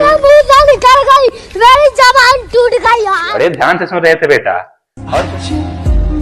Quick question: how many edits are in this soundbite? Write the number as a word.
one